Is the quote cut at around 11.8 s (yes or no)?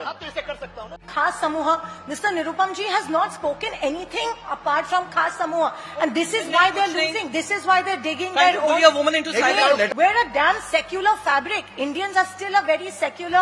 no